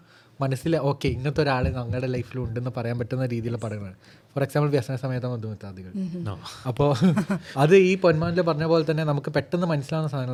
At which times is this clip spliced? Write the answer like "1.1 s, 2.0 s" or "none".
none